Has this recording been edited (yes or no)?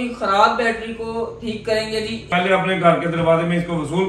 yes